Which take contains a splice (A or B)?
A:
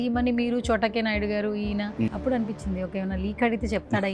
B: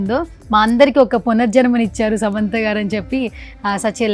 A